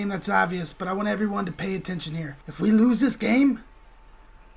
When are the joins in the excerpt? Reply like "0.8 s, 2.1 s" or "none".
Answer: 2.4 s